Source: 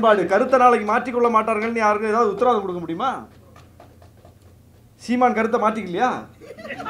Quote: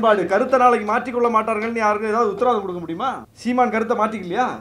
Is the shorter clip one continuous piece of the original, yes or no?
no